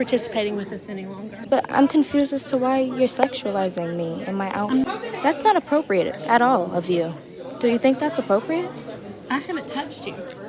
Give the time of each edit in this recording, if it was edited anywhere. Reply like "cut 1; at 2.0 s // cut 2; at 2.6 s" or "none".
cut 1; at 1.5 s // cut 2; at 4.9 s

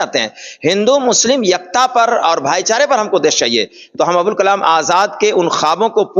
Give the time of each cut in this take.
none

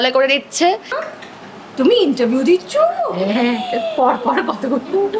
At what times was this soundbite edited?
cut 1; at 1.0 s

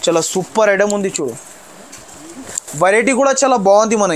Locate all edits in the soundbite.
cut 1; at 2.6 s

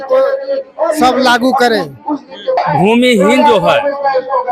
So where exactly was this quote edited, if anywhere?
cut 1; at 2.6 s

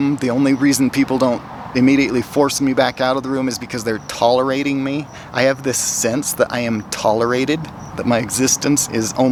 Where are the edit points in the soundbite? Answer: none

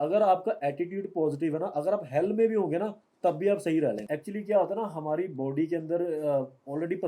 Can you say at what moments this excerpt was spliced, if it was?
cut 1; at 4.0 s

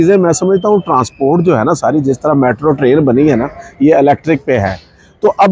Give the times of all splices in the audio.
none

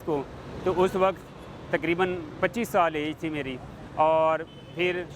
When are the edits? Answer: none

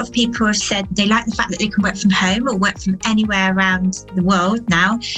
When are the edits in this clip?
cut 1; at 0.9 s

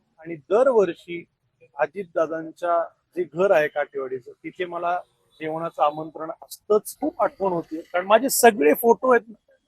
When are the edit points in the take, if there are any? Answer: cut 1; at 6.9 s

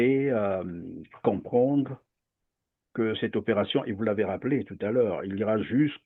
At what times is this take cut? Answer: none

